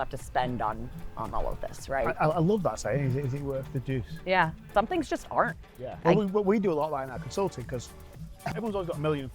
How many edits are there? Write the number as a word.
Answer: three